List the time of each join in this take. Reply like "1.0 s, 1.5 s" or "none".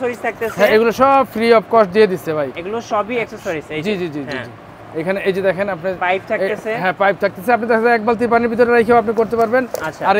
none